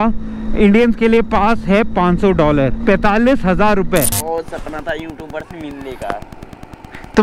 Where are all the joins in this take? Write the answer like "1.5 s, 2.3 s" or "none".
2.8 s, 4.2 s